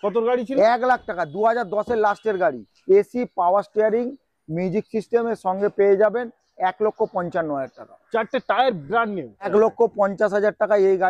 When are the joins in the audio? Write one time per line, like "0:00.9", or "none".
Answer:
0:02.7
0:09.5